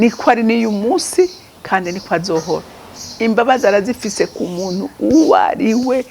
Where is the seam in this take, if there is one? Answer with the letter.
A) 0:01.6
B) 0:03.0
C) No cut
B